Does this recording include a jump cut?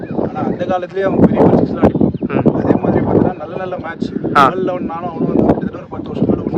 no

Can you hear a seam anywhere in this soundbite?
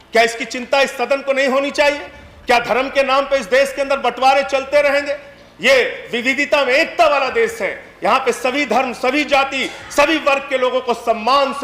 no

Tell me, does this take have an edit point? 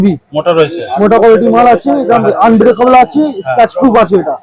no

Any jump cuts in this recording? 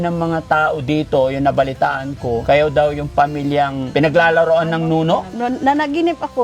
yes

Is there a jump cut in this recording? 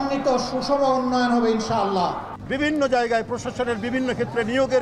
yes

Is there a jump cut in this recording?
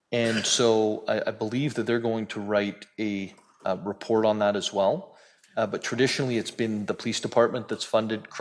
no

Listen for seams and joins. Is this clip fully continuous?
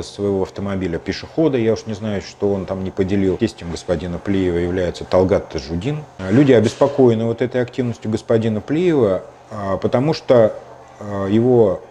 no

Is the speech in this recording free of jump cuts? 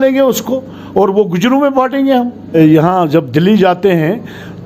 no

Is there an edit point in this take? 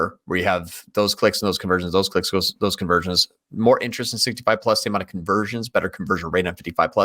no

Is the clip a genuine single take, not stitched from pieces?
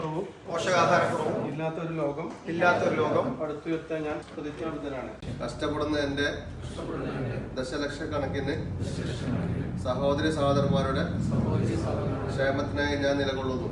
no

